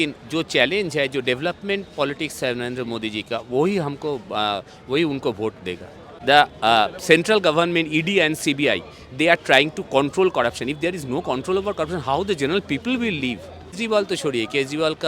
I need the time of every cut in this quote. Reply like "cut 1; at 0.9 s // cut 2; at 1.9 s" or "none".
cut 1; at 6.1 s // cut 2; at 13.7 s